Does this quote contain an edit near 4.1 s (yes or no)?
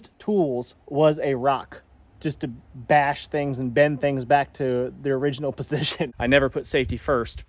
no